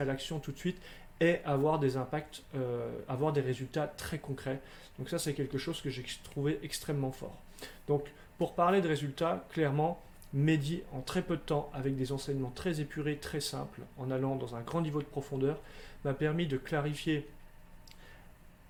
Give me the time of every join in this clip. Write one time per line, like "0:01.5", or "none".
none